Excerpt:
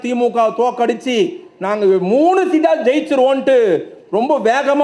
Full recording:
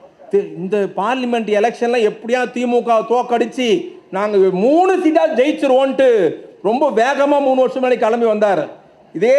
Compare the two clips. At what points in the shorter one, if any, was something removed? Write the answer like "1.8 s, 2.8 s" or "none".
none